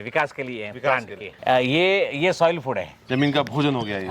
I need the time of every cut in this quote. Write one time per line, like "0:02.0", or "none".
0:01.2
0:02.9